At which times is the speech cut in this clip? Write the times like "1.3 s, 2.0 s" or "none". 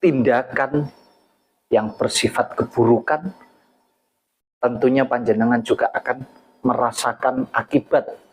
none